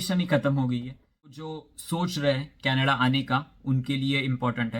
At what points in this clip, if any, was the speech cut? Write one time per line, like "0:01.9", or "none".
0:01.4